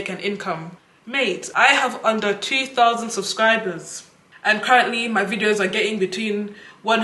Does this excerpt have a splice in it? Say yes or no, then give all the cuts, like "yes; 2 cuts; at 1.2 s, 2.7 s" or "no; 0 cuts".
no; 0 cuts